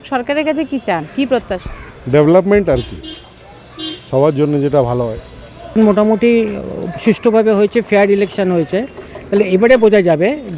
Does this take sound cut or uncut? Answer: uncut